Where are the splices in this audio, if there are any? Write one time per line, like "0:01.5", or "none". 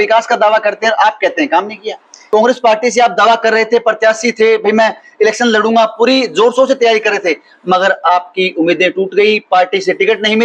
0:02.2